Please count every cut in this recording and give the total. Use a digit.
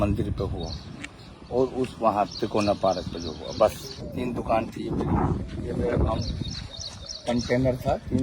1